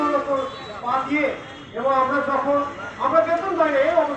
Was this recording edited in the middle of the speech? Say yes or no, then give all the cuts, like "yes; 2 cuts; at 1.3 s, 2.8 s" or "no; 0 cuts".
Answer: no; 0 cuts